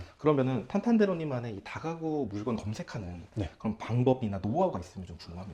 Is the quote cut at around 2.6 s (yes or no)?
no